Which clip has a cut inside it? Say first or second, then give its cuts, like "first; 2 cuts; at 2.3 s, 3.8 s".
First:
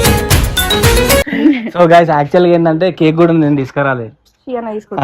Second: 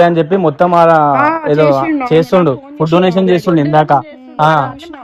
first; 1 cut; at 1.3 s